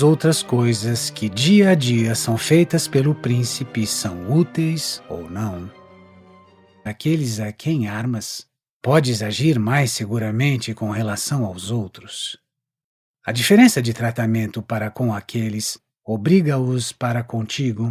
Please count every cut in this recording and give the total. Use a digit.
0